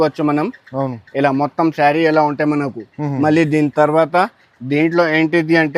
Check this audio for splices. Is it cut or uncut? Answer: uncut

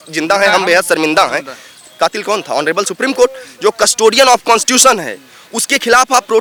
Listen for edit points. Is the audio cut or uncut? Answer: uncut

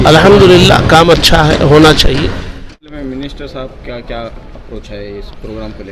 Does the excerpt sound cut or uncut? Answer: uncut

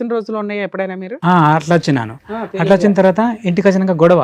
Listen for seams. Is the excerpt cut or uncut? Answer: uncut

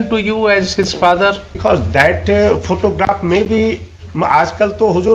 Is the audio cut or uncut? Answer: cut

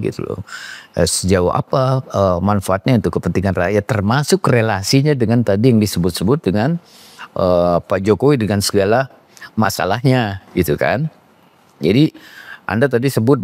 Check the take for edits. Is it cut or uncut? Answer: uncut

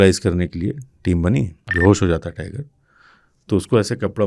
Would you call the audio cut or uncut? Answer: cut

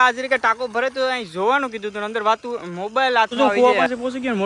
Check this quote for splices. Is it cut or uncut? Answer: cut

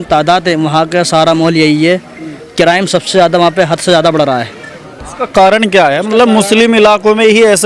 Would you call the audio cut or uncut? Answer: uncut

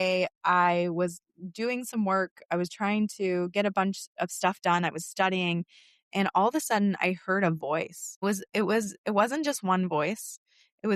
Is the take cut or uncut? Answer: uncut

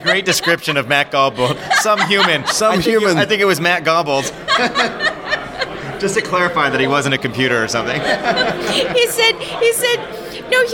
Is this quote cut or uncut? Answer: uncut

